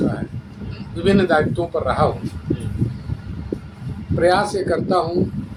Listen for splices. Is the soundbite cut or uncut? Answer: uncut